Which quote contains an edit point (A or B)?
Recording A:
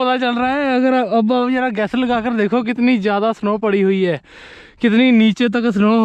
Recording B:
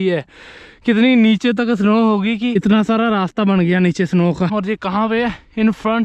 B